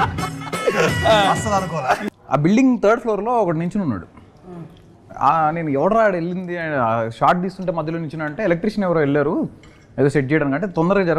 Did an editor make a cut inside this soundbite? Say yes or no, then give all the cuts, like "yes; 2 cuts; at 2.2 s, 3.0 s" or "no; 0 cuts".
yes; 1 cut; at 2.0 s